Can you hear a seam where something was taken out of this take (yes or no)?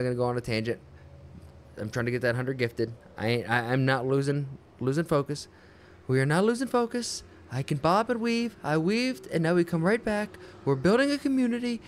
no